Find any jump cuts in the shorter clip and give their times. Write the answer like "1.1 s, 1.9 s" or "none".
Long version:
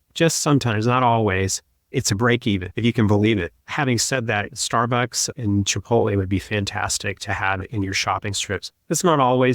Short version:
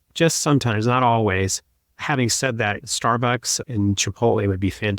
1.8 s